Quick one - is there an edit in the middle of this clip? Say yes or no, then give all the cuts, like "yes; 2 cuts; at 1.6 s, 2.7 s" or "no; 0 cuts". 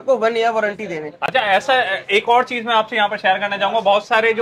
no; 0 cuts